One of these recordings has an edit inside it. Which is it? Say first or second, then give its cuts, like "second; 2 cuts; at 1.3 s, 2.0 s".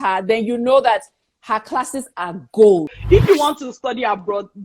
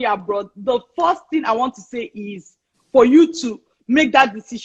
first; 1 cut; at 2.9 s